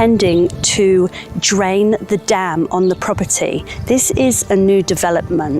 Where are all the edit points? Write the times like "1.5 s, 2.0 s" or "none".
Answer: 3.7 s